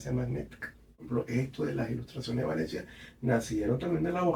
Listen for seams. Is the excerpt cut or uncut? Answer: cut